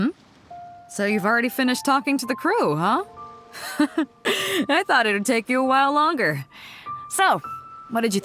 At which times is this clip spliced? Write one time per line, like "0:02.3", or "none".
0:04.1